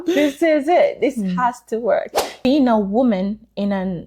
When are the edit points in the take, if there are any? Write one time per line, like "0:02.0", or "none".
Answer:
0:02.5